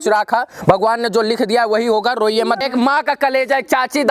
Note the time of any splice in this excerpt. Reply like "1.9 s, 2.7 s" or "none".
2.6 s